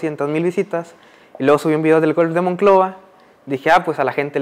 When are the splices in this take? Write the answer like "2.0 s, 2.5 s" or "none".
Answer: none